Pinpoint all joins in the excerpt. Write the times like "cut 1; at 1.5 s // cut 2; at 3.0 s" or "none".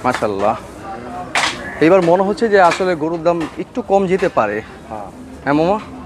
none